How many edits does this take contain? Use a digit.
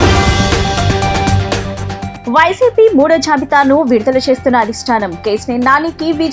0